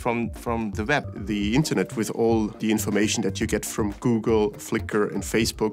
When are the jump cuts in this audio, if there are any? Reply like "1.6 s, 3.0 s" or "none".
1.1 s, 2.6 s